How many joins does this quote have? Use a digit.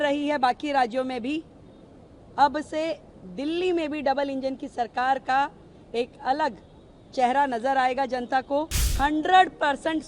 1